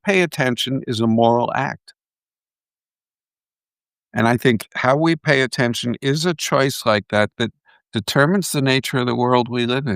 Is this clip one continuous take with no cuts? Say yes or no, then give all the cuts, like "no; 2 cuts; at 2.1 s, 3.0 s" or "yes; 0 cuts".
yes; 0 cuts